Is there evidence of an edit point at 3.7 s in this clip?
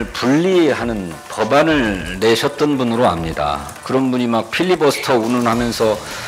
yes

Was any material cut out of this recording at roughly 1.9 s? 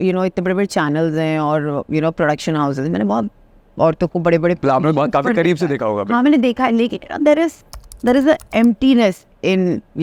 no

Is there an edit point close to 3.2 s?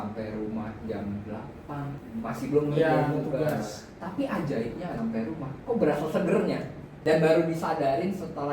no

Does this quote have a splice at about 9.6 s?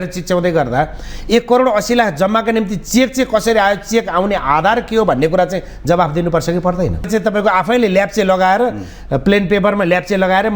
no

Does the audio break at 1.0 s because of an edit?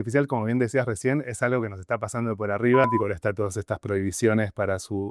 no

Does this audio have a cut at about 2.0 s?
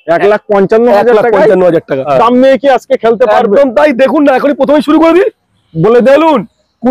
yes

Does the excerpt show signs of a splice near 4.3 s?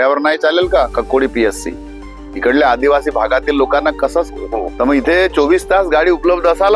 yes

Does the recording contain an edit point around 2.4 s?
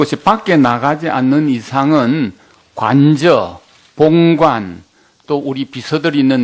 yes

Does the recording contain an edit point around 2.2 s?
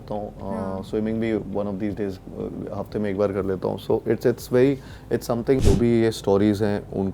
no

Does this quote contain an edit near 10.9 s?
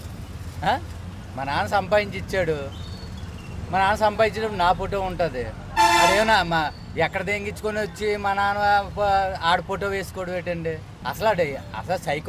yes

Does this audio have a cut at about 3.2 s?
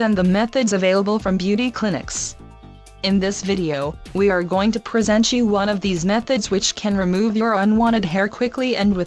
no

